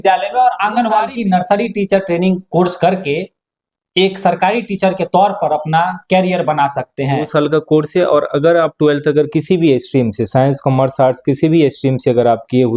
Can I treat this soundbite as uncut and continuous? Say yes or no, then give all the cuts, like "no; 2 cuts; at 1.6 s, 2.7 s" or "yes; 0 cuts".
no; 2 cuts; at 1.1 s, 7.3 s